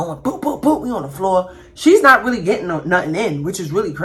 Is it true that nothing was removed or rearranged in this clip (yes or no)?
yes